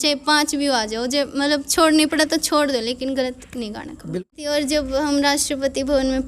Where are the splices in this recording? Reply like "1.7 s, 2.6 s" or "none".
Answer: 4.2 s